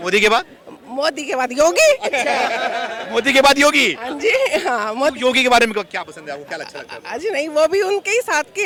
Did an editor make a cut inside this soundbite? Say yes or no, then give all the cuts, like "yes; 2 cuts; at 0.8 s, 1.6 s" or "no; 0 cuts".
no; 0 cuts